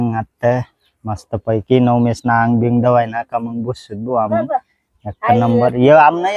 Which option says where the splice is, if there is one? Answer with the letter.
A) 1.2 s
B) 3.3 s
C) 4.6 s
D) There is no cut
D